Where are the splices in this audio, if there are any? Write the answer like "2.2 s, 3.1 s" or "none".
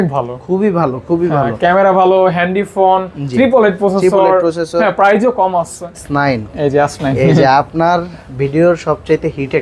6.0 s

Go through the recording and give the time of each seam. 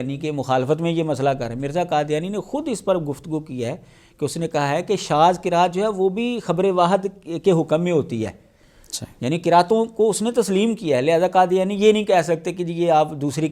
none

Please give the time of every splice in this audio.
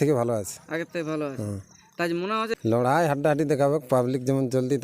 2.5 s

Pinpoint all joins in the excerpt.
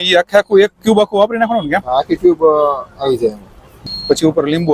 3.7 s

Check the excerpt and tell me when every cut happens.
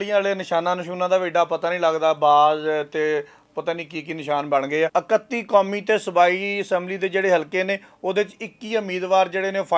4.9 s

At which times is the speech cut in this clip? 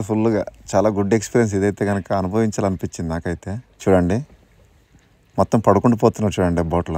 none

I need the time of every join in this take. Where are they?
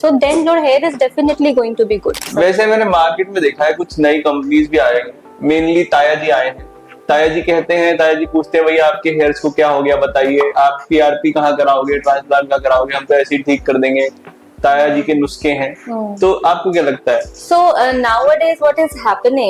none

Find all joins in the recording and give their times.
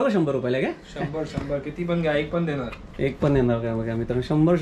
none

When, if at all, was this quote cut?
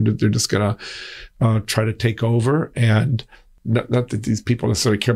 3.5 s

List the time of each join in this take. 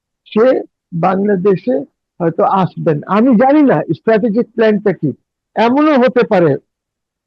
none

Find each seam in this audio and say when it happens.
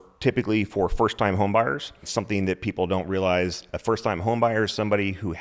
2.1 s

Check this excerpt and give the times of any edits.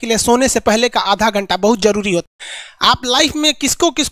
2.2 s

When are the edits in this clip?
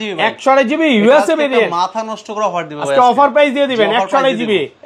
none

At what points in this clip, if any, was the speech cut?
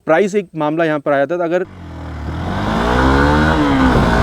1.7 s

